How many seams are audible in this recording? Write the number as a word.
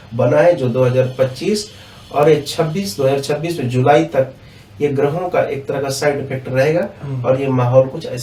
zero